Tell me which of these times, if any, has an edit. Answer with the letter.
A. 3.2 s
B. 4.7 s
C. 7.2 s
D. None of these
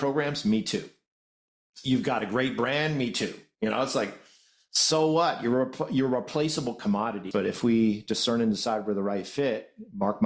C